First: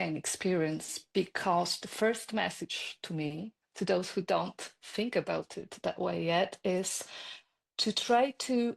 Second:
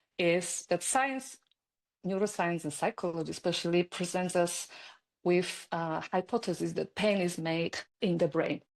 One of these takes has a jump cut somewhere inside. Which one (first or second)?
second